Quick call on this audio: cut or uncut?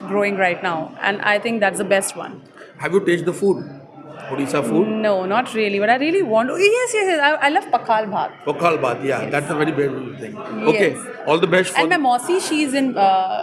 uncut